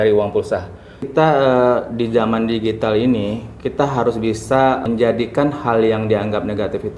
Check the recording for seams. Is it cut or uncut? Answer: cut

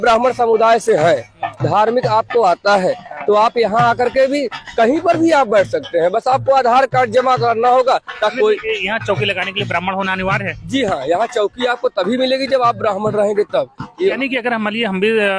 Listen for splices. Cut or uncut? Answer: cut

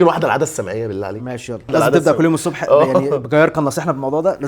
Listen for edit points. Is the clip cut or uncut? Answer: cut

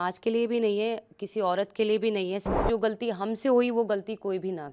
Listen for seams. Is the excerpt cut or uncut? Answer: cut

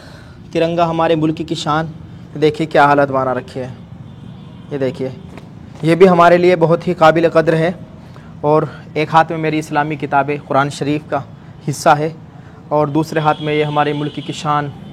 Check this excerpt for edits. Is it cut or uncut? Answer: uncut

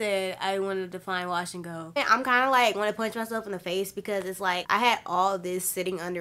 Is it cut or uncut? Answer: cut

